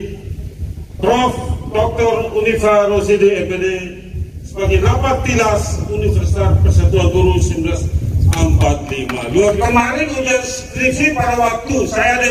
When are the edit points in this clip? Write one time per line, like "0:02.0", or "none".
0:09.6